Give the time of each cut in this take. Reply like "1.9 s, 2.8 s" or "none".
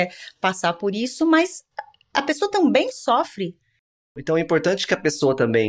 4.1 s

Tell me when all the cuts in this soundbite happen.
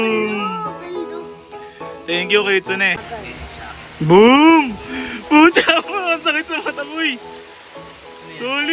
3.0 s

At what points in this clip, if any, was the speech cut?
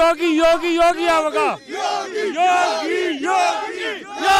none

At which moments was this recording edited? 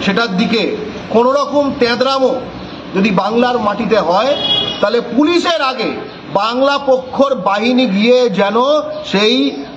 none

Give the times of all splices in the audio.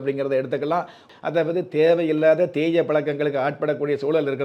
1.1 s

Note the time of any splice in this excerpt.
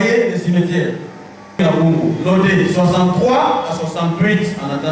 1.6 s

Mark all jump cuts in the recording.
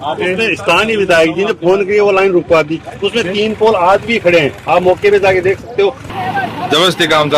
6.0 s

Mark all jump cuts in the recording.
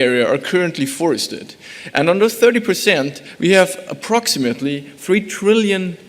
3.2 s

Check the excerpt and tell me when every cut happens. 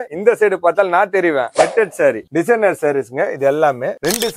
none

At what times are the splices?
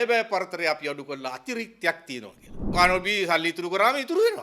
2.7 s

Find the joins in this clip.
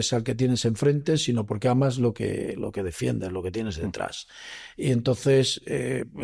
none

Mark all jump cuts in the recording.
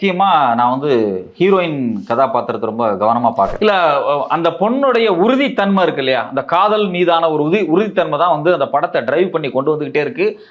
3.5 s

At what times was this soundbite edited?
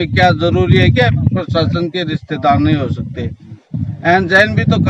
none

